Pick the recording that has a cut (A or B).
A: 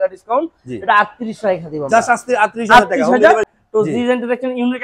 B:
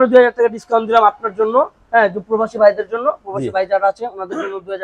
A